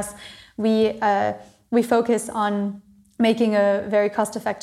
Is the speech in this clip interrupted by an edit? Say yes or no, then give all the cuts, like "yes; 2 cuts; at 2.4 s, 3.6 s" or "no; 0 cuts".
no; 0 cuts